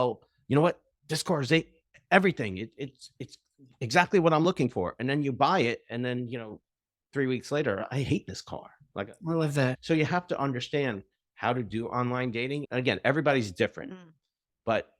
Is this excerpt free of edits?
no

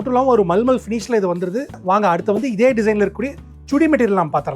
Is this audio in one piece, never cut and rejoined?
no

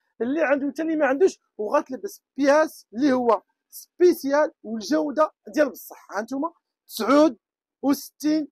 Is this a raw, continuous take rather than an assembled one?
yes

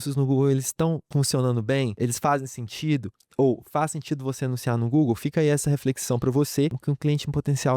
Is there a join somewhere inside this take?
yes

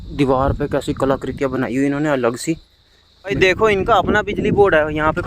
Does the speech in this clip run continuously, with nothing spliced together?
no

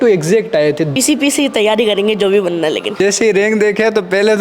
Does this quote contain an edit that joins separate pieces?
yes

